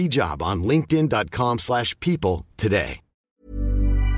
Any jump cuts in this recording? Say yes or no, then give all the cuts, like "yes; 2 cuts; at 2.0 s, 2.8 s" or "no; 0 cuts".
yes; 1 cut; at 3.1 s